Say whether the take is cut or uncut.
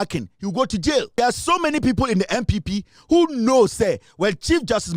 cut